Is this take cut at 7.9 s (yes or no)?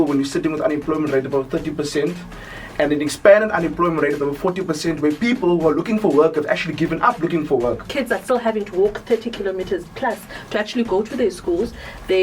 yes